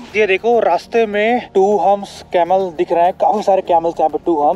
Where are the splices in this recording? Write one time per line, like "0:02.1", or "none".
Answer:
none